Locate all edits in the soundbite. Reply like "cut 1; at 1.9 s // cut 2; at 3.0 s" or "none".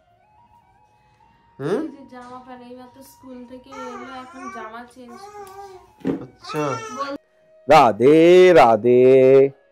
cut 1; at 7.2 s